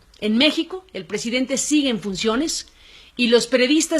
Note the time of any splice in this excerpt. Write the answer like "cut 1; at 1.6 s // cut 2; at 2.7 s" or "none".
cut 1; at 3.0 s